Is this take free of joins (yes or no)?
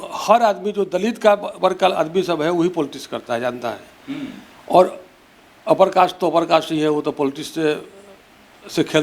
yes